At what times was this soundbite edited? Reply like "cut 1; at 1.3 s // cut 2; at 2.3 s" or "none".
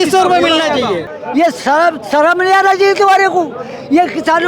cut 1; at 1.1 s